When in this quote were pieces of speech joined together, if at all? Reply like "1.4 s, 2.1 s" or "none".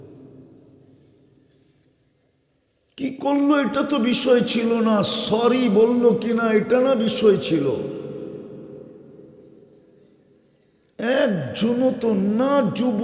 none